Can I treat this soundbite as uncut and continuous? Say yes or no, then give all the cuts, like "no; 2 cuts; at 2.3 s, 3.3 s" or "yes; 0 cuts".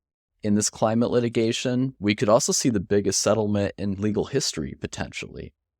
no; 1 cut; at 1.9 s